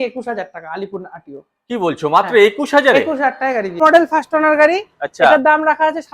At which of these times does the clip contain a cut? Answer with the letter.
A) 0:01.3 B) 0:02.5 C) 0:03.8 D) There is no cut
C